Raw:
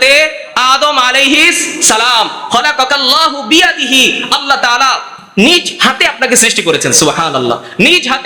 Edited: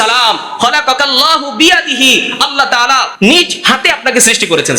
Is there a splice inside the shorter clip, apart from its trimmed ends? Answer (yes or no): yes